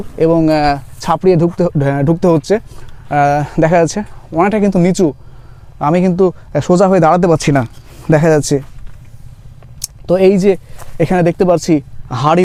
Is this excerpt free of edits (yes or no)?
yes